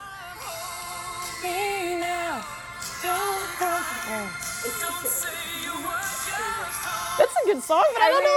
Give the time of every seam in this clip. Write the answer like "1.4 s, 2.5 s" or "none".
none

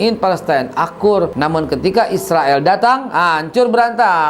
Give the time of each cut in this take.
1.3 s

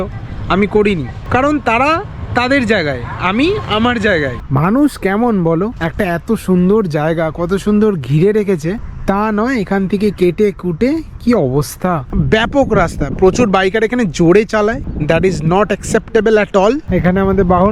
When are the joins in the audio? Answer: 4.4 s, 8.9 s, 12.1 s, 16.9 s

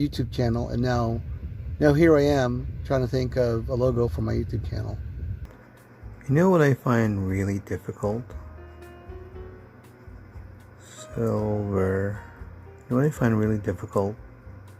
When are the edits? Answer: 5.5 s

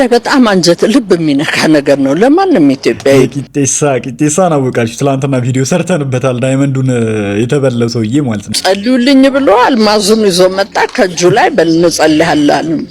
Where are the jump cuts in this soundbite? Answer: 8.5 s

